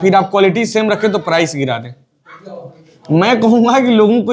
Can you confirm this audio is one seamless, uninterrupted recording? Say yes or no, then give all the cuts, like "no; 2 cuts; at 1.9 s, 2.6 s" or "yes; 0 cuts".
yes; 0 cuts